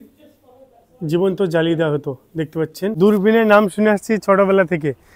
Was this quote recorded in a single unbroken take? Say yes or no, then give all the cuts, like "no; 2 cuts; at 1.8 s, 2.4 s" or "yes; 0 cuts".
no; 1 cut; at 2.9 s